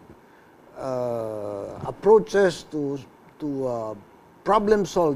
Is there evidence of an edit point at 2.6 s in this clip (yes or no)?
yes